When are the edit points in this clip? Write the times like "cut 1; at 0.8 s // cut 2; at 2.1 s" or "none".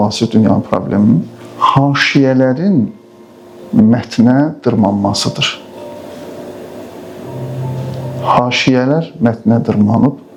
none